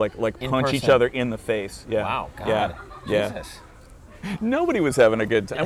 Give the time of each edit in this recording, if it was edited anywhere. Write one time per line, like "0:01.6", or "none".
0:04.3